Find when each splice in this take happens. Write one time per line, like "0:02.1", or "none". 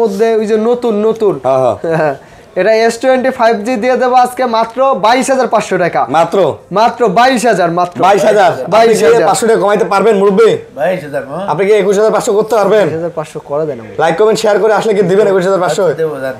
none